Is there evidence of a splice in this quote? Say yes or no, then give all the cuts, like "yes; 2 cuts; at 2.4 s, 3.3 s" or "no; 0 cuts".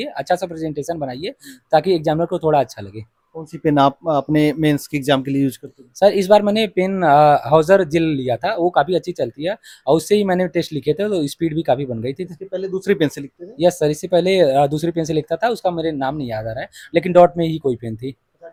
no; 0 cuts